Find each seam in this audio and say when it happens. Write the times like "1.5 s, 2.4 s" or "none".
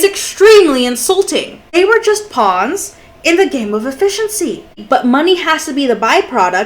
1.7 s, 4.8 s